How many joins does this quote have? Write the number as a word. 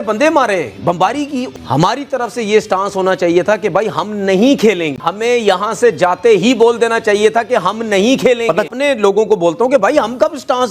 two